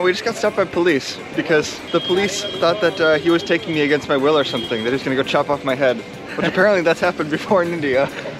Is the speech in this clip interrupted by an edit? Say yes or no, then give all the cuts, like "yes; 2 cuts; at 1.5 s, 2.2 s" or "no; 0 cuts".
yes; 1 cut; at 1.8 s